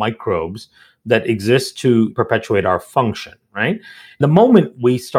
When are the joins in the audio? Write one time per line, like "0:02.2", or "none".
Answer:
0:02.1
0:04.2